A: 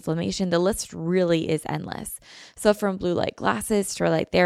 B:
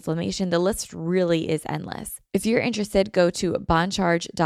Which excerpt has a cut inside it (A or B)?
B